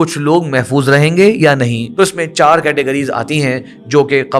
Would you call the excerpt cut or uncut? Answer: cut